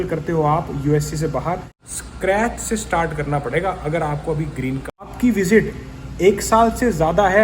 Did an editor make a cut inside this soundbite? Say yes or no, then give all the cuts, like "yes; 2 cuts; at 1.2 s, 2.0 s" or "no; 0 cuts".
yes; 2 cuts; at 1.8 s, 5.1 s